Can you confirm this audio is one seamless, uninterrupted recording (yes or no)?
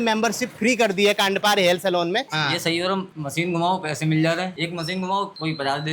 no